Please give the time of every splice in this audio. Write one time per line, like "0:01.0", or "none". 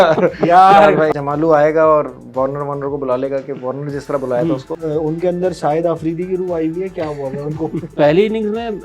0:01.1
0:04.8
0:07.9